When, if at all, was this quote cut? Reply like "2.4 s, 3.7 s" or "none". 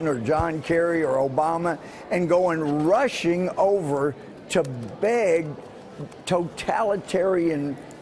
none

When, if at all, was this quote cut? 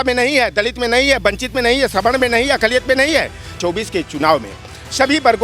3.6 s

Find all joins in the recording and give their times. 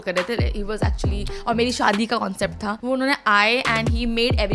2.8 s

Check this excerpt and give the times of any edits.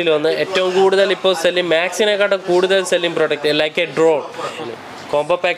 4.6 s

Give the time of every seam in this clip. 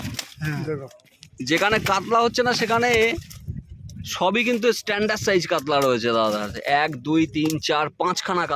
none

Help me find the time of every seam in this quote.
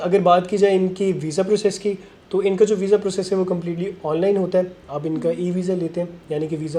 none

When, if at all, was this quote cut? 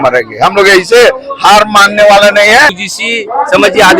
2.8 s

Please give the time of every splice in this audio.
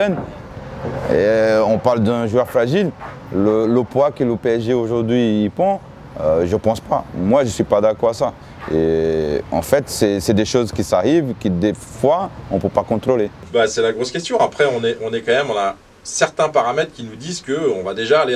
13.4 s

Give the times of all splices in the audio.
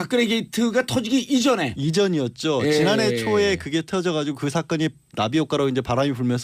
1.0 s

